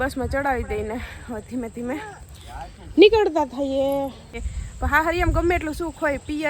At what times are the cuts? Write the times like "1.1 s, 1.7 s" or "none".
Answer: 4.3 s